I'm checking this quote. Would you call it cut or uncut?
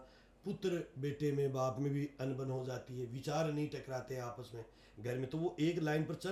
uncut